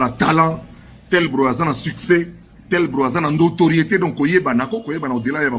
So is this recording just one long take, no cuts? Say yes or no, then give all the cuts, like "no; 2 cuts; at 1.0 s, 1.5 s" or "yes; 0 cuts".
yes; 0 cuts